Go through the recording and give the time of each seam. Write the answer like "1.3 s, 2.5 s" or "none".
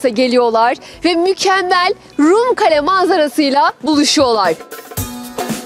4.7 s